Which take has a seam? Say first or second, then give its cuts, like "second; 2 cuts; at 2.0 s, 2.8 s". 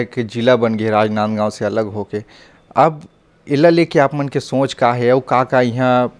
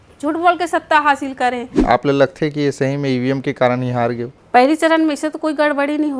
second; 2 cuts; at 1.8 s, 4.3 s